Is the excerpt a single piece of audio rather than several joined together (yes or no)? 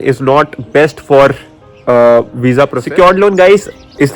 no